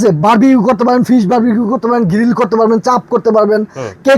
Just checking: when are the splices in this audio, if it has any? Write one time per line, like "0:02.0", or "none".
none